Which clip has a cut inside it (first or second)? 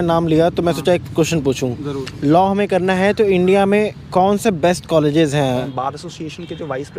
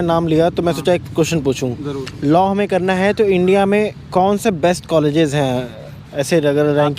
first